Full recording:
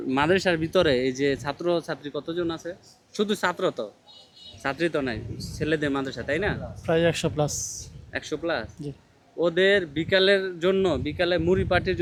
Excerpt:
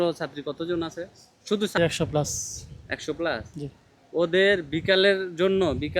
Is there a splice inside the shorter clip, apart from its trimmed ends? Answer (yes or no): yes